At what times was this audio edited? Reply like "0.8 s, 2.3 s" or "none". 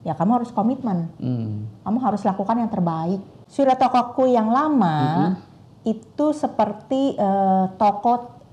3.4 s